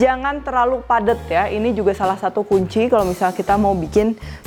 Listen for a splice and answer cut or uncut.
uncut